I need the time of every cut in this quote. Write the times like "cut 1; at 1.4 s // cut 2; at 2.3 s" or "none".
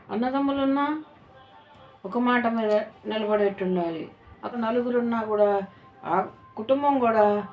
cut 1; at 4.5 s

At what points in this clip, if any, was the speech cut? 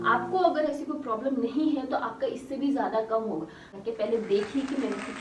cut 1; at 3.7 s

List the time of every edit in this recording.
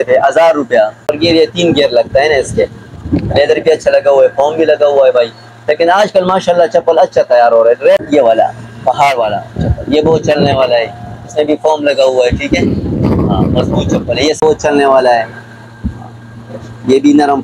cut 1; at 1.1 s // cut 2; at 8.0 s // cut 3; at 14.4 s

